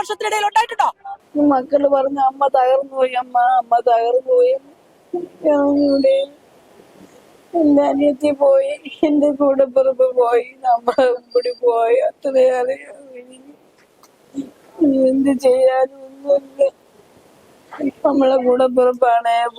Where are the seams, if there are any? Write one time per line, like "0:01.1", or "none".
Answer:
0:01.1